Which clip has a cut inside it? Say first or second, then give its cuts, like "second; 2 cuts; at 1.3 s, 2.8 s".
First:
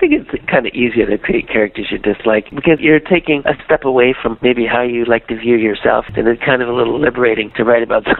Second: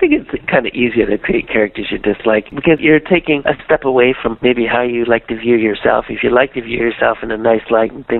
first; 1 cut; at 6.1 s